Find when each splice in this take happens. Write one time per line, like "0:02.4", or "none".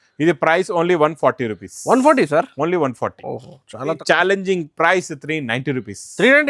0:04.0